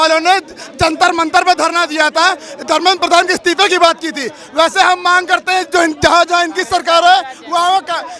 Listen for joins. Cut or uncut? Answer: uncut